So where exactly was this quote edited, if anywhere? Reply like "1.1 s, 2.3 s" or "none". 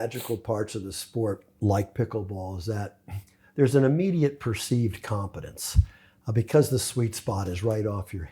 none

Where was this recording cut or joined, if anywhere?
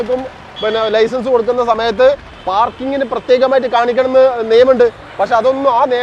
none

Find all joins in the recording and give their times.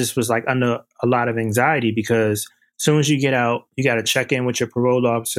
none

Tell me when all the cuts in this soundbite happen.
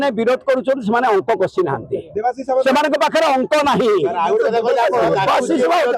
none

